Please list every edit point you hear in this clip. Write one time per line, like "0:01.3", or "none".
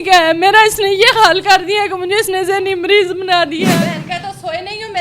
0:03.7